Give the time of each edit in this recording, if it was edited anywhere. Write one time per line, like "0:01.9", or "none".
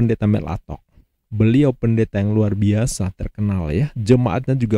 none

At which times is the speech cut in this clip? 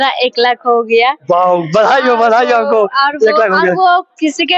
none

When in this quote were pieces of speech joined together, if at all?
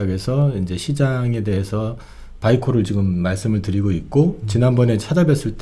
none

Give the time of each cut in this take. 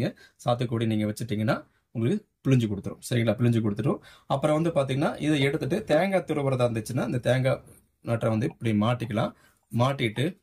none

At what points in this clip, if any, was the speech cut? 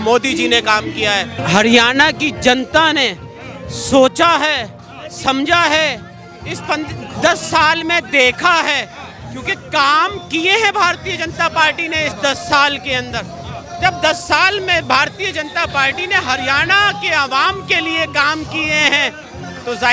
0:01.4

